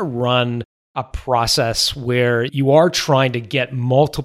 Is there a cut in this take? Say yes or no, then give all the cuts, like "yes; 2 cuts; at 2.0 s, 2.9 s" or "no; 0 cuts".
yes; 1 cut; at 2.5 s